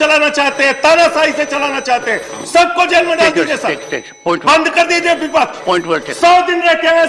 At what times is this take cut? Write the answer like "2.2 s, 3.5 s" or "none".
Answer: none

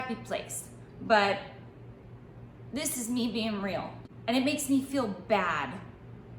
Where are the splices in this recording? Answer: 4.0 s

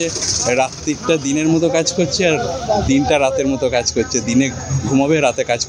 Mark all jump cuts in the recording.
none

